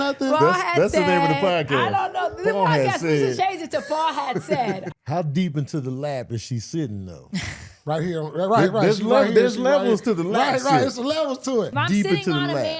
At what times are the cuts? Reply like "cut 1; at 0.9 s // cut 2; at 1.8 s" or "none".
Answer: cut 1; at 4.9 s // cut 2; at 11.7 s